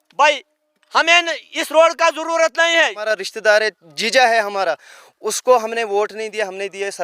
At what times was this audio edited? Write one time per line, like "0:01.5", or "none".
0:03.0